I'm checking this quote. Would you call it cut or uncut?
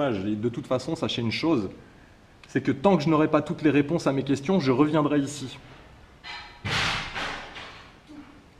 uncut